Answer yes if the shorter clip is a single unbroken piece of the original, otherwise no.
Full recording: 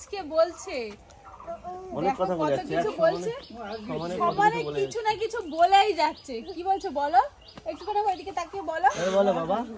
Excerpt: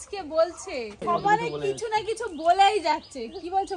no